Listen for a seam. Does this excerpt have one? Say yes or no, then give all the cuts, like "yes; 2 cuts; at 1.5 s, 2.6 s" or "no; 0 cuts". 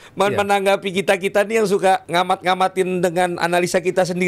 yes; 1 cut; at 2.1 s